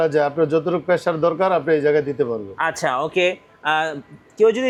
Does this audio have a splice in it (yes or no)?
no